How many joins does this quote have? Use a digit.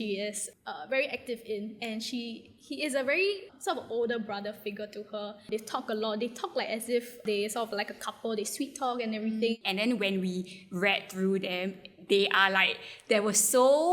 4